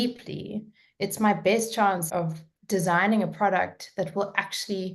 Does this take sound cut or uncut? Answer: cut